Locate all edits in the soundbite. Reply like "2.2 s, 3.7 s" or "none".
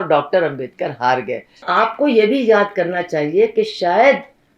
1.6 s